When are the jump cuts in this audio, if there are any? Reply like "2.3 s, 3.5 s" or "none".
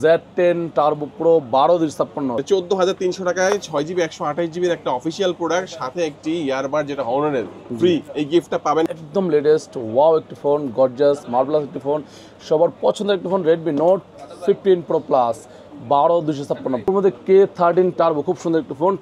2.4 s, 8.9 s, 16.8 s